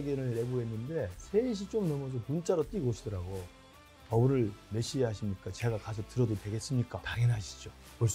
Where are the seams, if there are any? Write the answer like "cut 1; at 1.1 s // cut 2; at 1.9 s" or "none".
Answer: cut 1; at 7.1 s